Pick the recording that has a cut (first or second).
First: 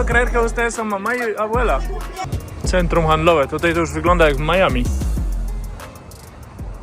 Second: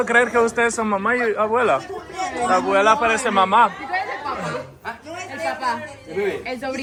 first